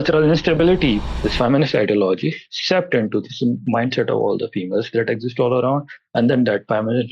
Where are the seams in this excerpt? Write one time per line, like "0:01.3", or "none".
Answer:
0:01.1

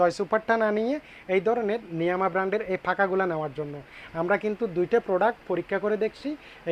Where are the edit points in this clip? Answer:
none

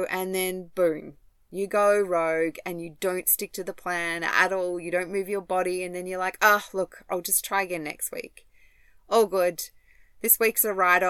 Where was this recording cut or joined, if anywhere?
none

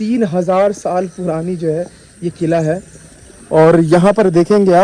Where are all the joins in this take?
none

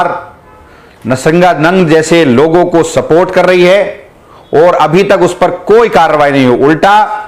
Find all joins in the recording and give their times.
none

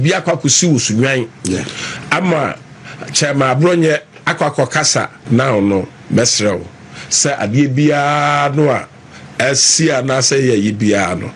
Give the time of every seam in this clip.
0:05.1

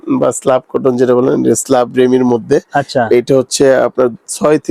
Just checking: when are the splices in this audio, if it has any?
none

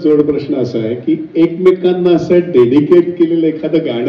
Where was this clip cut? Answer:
none

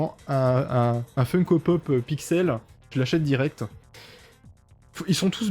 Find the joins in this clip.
none

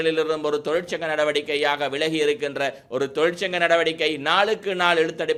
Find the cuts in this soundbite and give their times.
none

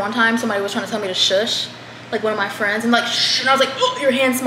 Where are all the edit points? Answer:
none

